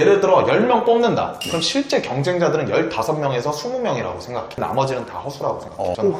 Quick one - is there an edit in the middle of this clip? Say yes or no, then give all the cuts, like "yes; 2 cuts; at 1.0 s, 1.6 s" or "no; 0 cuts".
yes; 1 cut; at 4.6 s